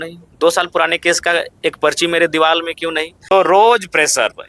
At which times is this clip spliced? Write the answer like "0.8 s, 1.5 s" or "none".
3.2 s

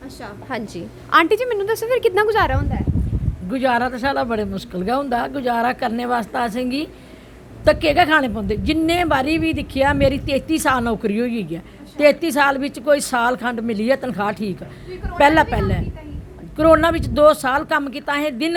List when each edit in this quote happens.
none

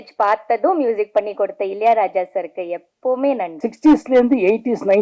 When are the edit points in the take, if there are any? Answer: 3.6 s

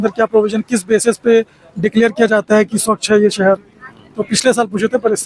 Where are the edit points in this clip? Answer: none

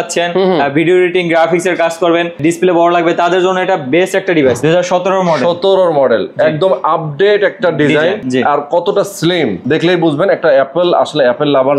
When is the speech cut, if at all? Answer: 2.4 s, 4.6 s, 8.2 s, 9.6 s

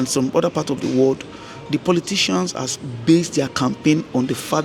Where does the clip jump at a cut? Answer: none

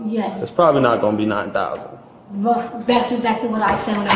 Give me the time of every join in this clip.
none

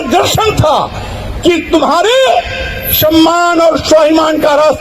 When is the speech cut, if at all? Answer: none

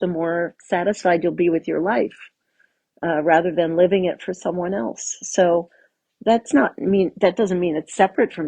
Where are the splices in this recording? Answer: none

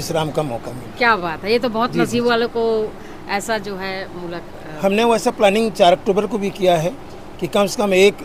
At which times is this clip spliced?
none

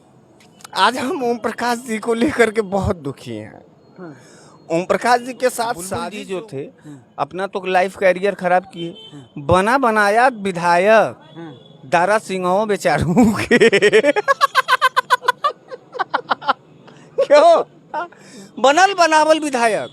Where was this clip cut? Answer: 5.9 s

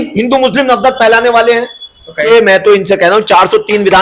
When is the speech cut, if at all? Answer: 2.2 s

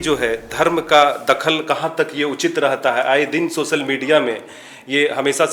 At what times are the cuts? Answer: none

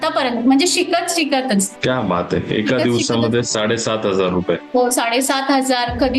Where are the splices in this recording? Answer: 1.7 s

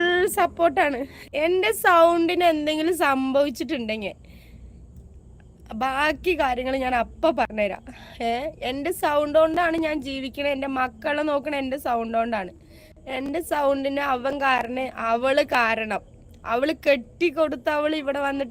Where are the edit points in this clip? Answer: 1.1 s

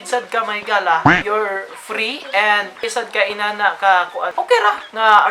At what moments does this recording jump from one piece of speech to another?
2.9 s, 4.2 s

